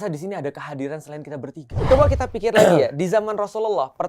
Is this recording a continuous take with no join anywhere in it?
no; 1 cut; at 1.8 s

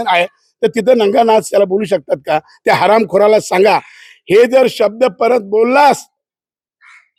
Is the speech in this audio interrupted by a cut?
no; 0 cuts

